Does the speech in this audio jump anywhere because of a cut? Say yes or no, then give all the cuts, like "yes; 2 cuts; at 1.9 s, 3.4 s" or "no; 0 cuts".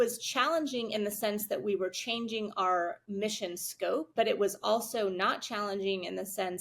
yes; 2 cuts; at 3.0 s, 4.1 s